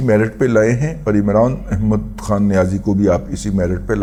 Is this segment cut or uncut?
uncut